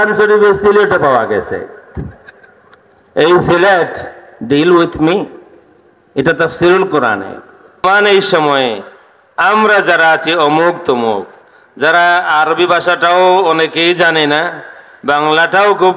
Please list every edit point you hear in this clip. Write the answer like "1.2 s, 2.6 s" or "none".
7.8 s